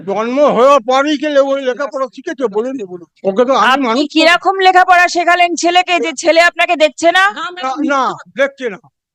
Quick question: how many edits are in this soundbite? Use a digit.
0